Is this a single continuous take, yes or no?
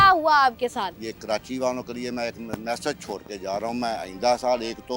no